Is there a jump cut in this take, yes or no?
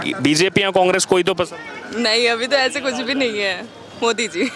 no